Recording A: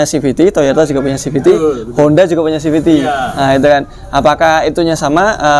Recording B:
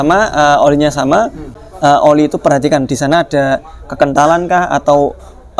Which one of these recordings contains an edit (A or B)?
B